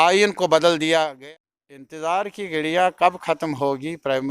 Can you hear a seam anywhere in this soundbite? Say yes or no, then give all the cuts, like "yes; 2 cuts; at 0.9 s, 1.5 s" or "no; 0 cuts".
yes; 1 cut; at 1.1 s